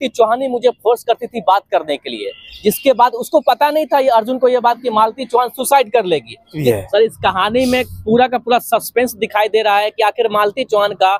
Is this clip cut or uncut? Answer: cut